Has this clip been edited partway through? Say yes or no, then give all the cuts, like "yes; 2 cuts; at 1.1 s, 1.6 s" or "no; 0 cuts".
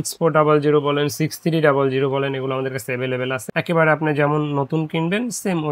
no; 0 cuts